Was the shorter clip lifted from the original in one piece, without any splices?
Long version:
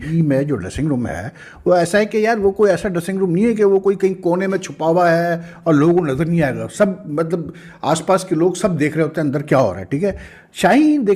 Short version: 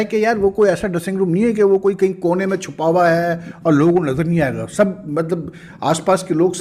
yes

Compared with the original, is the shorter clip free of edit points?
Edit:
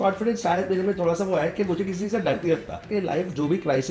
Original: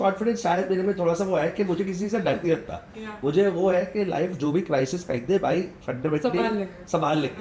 no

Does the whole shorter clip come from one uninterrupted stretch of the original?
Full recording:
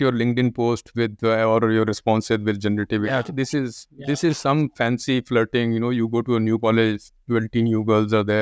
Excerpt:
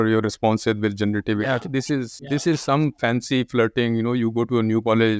no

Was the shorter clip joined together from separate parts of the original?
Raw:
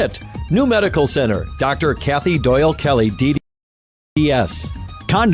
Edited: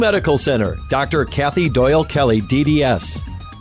yes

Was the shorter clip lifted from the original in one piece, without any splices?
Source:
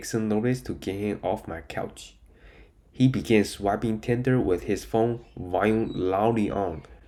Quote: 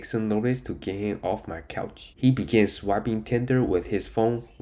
no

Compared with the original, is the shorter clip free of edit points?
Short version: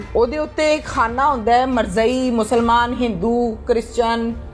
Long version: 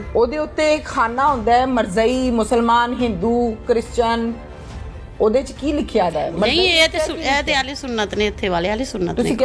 yes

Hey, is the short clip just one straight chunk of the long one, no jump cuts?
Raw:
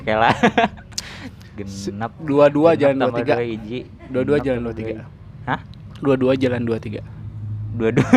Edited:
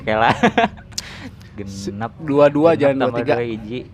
yes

